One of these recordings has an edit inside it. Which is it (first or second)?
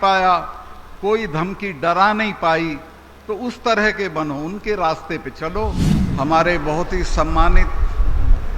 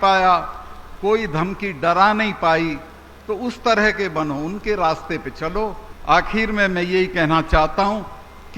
first